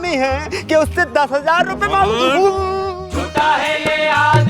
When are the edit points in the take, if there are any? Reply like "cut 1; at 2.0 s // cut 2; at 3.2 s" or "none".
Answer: cut 1; at 2.9 s